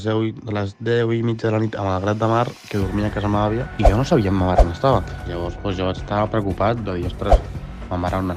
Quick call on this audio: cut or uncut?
uncut